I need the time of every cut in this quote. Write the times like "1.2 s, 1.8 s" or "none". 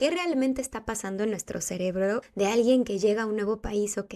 2.3 s